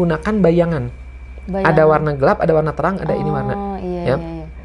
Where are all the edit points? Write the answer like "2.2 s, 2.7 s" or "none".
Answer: none